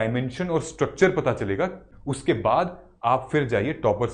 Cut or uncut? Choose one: cut